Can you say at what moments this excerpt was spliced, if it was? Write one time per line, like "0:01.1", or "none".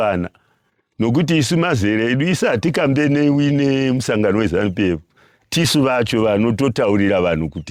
none